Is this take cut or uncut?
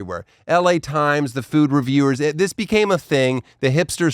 uncut